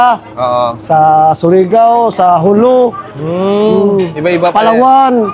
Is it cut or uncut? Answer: uncut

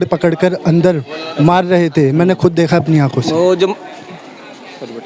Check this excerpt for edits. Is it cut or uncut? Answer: uncut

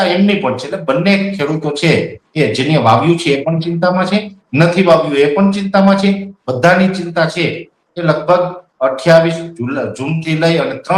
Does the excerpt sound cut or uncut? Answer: uncut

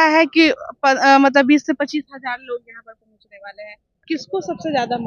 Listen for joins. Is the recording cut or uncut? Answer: cut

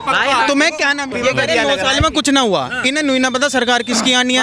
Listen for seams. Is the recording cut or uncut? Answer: cut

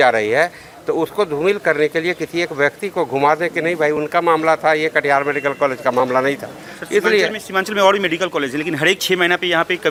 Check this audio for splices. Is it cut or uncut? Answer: uncut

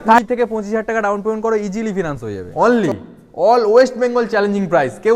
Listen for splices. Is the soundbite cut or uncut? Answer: cut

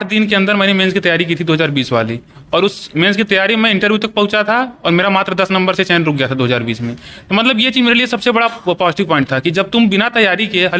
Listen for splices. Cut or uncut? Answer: uncut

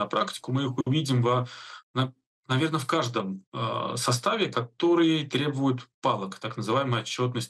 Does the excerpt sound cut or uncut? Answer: uncut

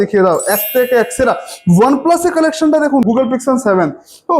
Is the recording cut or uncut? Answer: cut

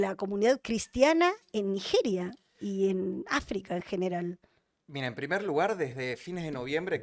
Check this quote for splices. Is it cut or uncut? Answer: uncut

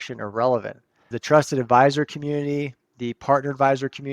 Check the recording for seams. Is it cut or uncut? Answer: cut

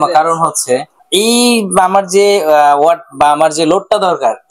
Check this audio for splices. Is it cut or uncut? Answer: cut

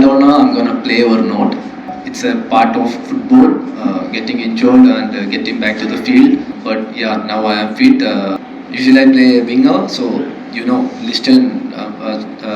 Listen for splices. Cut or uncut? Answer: cut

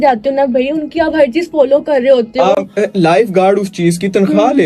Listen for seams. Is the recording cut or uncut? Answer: uncut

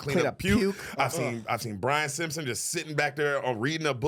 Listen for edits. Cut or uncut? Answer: uncut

